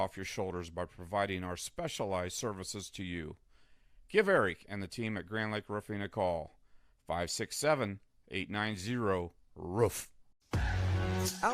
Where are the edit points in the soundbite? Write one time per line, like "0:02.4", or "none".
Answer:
0:10.5